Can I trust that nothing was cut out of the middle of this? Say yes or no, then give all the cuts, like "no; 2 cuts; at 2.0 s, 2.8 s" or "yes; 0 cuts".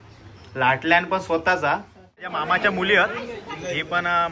no; 1 cut; at 2.2 s